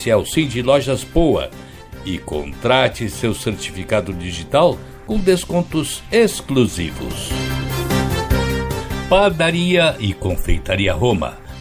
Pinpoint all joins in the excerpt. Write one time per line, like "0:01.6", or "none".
0:07.6
0:08.9